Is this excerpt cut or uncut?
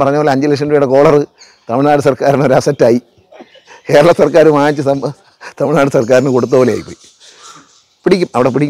uncut